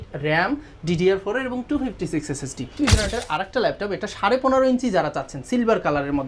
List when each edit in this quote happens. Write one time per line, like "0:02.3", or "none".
0:02.7